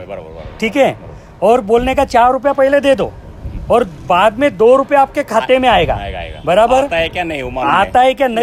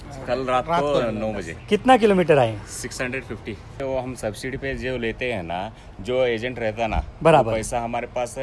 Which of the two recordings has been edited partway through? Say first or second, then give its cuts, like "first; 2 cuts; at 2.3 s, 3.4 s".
second; 1 cut; at 3.8 s